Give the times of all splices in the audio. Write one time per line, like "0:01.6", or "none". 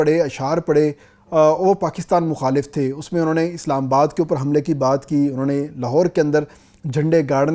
none